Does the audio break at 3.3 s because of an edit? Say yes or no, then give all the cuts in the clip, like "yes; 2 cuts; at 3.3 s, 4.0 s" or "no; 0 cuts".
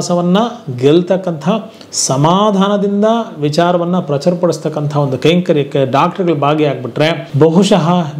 no; 1 cut; at 7.2 s